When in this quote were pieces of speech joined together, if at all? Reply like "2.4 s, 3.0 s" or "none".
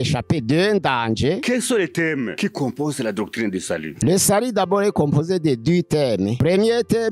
1.4 s, 2.3 s, 3.9 s, 6.4 s